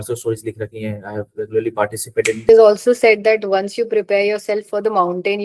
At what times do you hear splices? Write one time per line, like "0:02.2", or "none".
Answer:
0:02.5